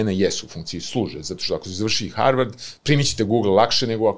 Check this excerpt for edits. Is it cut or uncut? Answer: uncut